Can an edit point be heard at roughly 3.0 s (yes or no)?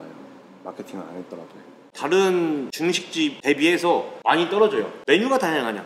yes